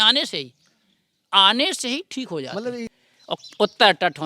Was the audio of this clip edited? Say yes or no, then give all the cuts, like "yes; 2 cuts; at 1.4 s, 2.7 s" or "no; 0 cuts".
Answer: yes; 1 cut; at 3.0 s